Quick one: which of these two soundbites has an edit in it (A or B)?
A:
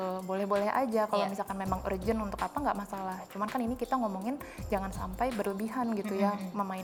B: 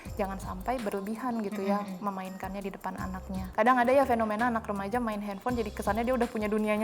B